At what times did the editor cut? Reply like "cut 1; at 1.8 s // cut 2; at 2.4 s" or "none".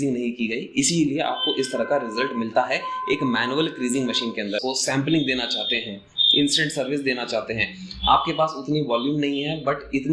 cut 1; at 4.6 s